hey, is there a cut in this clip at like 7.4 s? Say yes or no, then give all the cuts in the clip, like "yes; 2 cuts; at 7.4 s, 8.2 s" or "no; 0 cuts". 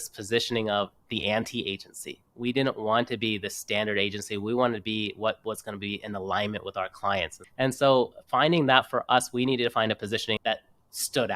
yes; 2 cuts; at 7.4 s, 10.4 s